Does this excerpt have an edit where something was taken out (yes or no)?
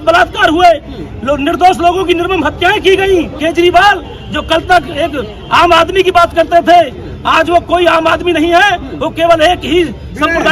yes